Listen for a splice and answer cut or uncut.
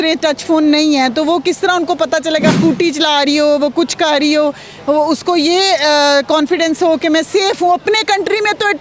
cut